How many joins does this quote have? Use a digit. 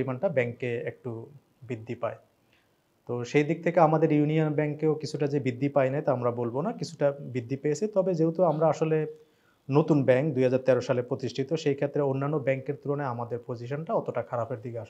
0